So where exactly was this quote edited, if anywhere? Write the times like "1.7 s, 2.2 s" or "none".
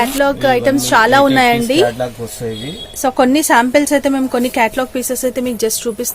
none